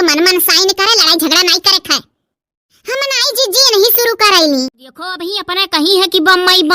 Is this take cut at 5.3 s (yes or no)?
yes